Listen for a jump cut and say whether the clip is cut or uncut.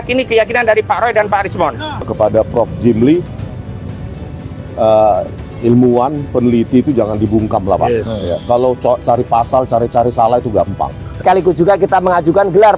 cut